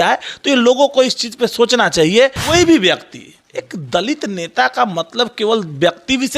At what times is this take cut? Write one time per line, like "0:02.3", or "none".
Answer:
0:02.4

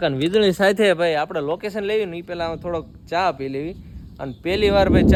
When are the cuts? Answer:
none

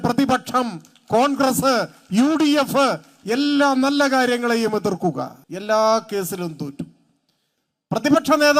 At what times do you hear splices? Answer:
0:05.4

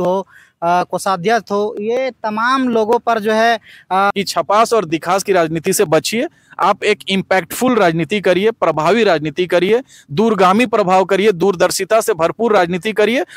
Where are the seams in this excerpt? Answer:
0:04.1

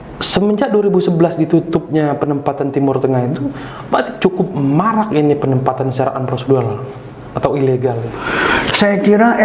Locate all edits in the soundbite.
0:08.1

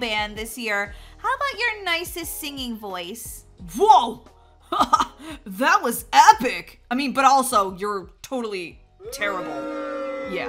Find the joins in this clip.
none

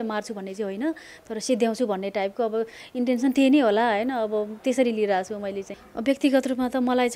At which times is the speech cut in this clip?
0:05.7

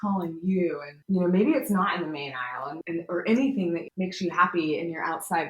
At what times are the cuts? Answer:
0:00.9
0:02.6
0:03.8

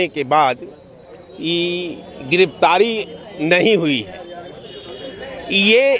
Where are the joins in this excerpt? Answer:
none

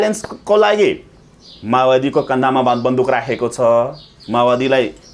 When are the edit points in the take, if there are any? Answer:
none

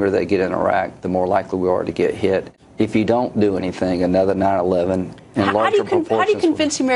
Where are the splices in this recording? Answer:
0:02.5

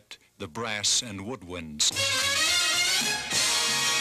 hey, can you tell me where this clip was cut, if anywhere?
0:02.8

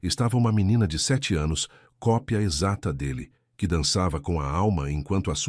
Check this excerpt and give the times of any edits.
0:01.7

